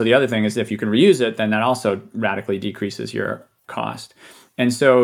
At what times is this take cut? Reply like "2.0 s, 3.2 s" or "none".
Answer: 3.6 s